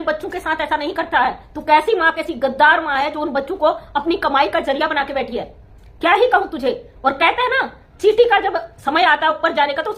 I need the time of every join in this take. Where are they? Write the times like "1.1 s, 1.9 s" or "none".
none